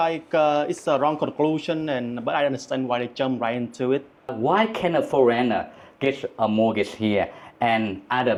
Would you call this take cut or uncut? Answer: uncut